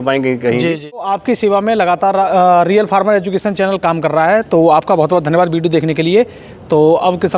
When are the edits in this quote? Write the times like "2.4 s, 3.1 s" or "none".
1.0 s